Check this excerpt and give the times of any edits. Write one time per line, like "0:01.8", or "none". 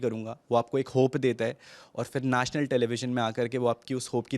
none

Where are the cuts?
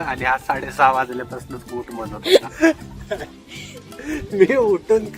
0:02.5

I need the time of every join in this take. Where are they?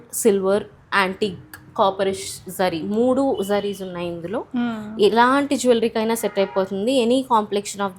none

